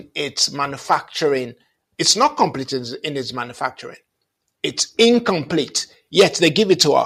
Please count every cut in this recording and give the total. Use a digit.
0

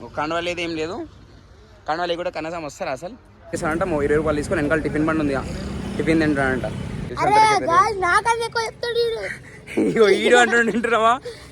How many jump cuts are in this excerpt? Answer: 2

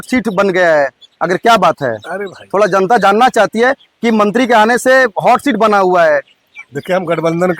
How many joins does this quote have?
0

